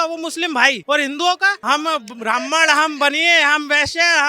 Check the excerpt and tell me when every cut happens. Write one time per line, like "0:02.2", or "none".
0:00.8
0:01.6